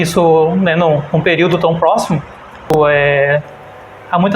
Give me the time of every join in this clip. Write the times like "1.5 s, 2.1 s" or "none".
2.6 s